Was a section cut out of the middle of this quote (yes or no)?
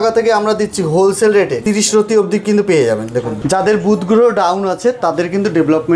yes